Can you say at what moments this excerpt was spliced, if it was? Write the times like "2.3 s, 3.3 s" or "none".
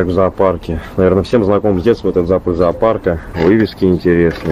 3.3 s